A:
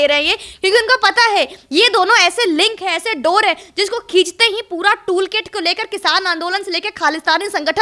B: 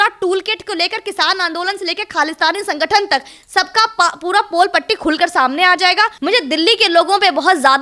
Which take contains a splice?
B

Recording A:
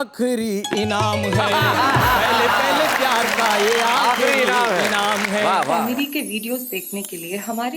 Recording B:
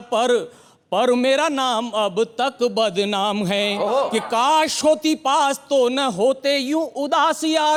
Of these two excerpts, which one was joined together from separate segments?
A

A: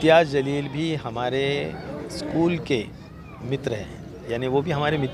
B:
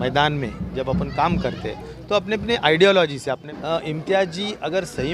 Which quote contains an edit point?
B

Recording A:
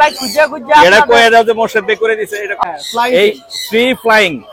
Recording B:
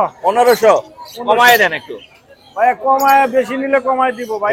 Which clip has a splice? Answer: A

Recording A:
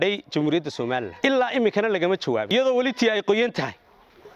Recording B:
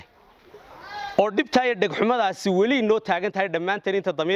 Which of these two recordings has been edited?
A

